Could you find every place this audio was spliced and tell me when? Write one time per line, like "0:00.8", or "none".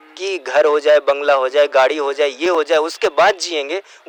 none